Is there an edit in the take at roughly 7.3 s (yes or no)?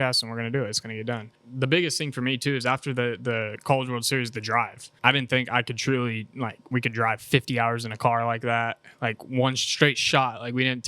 no